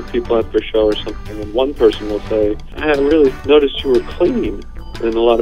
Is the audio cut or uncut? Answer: cut